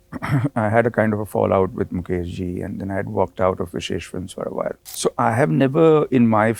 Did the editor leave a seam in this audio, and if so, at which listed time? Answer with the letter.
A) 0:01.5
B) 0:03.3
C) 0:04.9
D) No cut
C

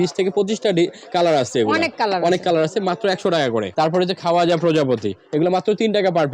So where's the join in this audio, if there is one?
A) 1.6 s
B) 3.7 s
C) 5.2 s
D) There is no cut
B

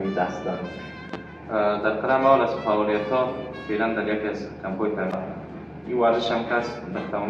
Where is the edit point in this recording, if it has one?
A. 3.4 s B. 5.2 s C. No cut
B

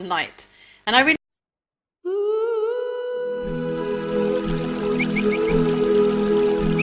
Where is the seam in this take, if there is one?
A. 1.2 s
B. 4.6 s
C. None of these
C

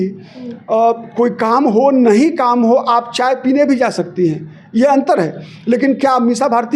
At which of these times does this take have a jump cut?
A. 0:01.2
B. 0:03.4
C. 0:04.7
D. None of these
D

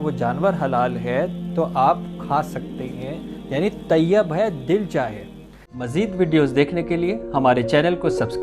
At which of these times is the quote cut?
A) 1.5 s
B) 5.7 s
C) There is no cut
B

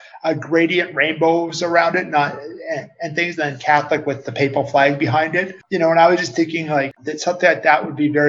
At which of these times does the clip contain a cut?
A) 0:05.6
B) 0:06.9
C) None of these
A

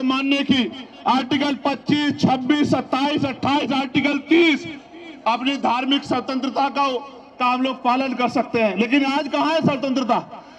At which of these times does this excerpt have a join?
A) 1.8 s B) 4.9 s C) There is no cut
C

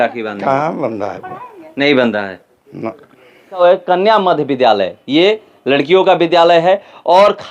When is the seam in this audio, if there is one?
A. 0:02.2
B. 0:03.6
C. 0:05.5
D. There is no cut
B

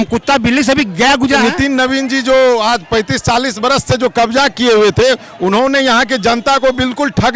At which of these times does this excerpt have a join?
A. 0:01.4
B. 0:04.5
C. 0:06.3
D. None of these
A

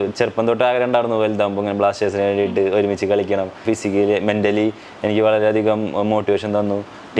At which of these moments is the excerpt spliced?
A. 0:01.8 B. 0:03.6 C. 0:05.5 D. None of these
B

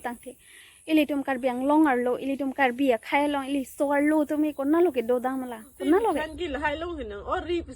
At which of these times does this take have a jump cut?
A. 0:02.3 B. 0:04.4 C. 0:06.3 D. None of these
C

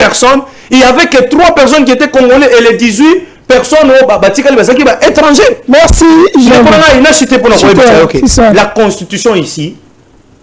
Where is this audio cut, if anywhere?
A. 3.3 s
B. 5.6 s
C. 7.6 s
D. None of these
D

